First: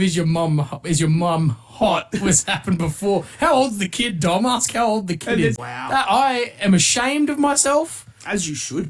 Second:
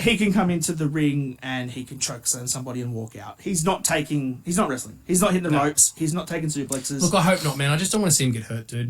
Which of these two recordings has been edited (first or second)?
first